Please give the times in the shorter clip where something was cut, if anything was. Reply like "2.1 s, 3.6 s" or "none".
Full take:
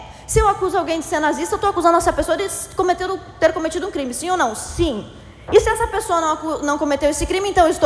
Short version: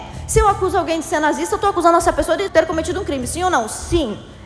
2.5 s